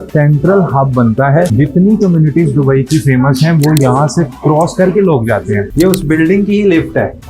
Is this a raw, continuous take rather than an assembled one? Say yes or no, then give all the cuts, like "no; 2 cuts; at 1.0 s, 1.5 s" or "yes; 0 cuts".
no; 2 cuts; at 1.5 s, 5.6 s